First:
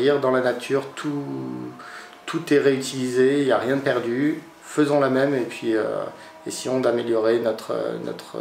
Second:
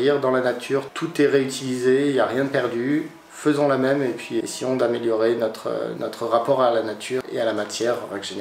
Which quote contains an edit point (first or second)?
second